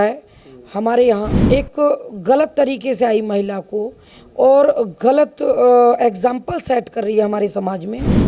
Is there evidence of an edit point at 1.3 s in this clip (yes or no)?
yes